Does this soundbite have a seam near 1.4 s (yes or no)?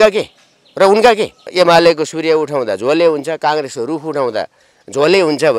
yes